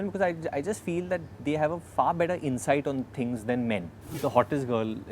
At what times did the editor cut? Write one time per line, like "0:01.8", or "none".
0:04.0